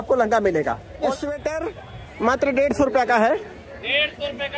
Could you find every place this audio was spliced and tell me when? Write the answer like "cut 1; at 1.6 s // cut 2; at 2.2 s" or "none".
cut 1; at 1.1 s